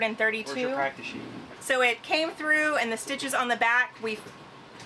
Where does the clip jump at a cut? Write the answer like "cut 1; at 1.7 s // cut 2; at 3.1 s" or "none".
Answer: none

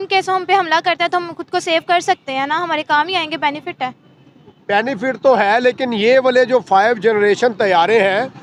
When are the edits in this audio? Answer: none

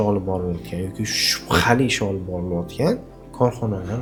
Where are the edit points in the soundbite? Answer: none

